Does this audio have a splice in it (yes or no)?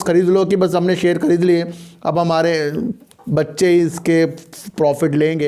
no